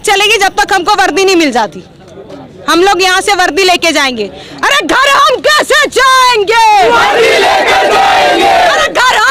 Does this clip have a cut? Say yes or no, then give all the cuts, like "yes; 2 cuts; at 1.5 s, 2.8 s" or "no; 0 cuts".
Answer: no; 0 cuts